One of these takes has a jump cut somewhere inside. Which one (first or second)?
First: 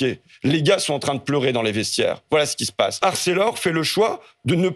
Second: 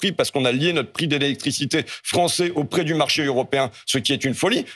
first